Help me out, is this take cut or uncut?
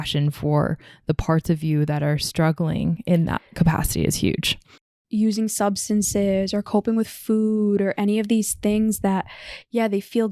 cut